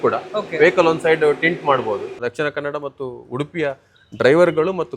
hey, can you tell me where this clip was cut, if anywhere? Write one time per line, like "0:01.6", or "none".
0:02.1